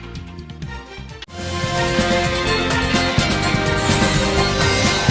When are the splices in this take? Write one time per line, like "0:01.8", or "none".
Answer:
none